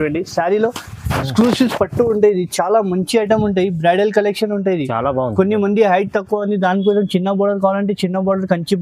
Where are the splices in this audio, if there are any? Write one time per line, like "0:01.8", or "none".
none